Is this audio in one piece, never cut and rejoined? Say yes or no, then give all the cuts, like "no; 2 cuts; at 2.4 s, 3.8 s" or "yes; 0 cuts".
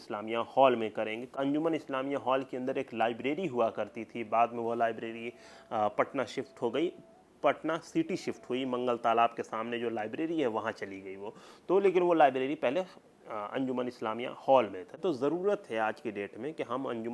no; 2 cuts; at 1.4 s, 14.9 s